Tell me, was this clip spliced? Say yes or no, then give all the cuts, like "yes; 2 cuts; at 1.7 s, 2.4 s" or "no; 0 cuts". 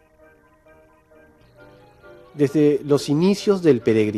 yes; 1 cut; at 2.7 s